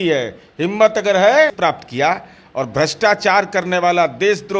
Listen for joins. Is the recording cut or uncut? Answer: cut